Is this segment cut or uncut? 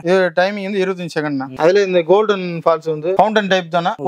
uncut